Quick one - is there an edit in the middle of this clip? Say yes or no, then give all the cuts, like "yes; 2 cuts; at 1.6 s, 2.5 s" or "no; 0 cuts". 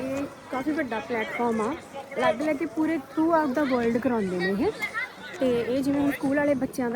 no; 0 cuts